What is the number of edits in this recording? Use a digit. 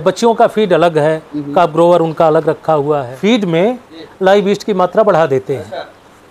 1